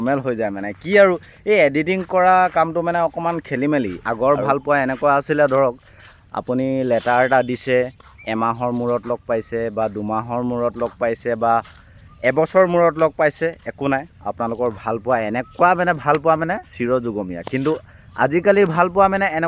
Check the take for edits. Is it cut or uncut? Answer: cut